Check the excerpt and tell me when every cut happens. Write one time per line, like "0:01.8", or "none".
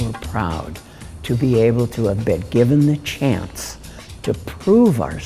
none